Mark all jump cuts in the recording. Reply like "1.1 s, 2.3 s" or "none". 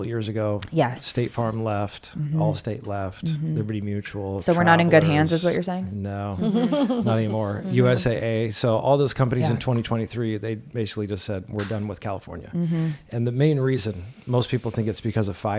none